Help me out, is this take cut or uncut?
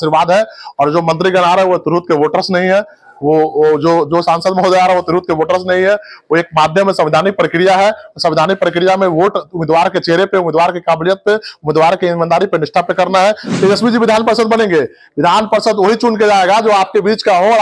cut